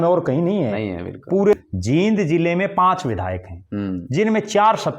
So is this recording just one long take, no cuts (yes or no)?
no